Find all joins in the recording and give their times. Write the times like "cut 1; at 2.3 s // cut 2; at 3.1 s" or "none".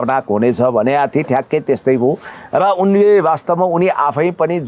none